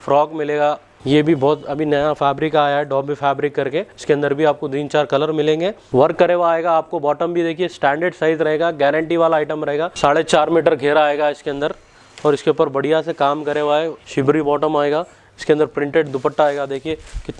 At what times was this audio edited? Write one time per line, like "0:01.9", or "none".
0:00.9
0:03.9
0:05.8
0:09.9
0:14.0